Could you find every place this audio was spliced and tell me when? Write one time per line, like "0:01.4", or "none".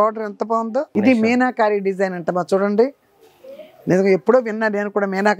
0:00.9